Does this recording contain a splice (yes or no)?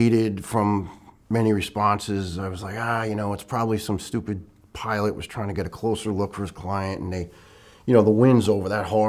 no